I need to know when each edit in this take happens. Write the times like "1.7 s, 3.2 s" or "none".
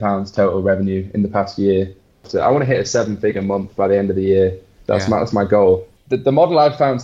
2.3 s, 5.9 s